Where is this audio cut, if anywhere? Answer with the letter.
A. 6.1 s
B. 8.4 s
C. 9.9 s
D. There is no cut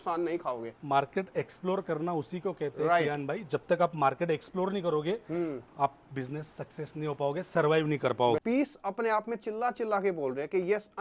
B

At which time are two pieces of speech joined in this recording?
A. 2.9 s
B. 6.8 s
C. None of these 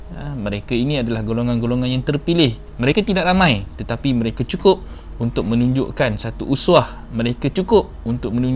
A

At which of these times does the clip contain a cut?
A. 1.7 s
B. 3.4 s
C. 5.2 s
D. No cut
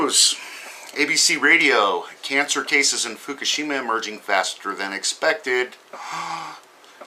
B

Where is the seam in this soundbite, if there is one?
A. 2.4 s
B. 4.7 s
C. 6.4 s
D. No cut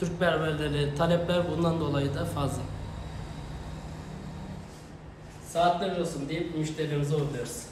B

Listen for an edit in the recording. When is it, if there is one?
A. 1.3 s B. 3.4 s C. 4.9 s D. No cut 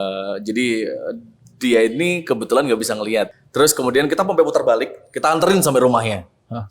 B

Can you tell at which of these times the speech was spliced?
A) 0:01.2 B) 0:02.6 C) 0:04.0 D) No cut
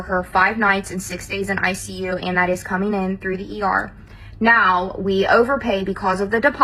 D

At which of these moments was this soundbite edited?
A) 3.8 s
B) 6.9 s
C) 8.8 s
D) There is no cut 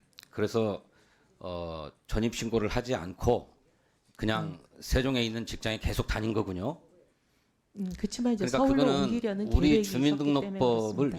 D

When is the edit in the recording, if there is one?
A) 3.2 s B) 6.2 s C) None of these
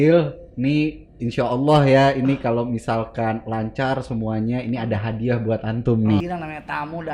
B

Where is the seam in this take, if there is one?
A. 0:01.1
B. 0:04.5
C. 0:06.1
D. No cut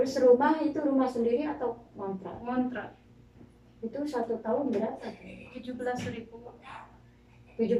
D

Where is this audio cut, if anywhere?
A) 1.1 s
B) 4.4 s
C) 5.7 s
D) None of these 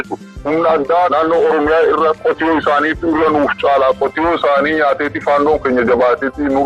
A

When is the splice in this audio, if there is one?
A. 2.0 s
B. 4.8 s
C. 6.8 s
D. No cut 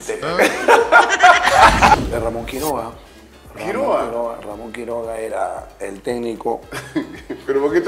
A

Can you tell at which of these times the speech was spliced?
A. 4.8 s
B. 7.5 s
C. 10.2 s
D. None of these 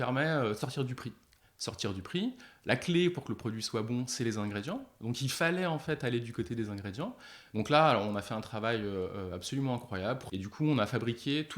C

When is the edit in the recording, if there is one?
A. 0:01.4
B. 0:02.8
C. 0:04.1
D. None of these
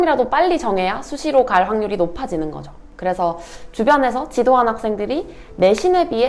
B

